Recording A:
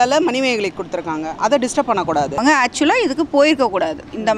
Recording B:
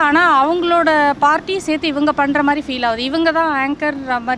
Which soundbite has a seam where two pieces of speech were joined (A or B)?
A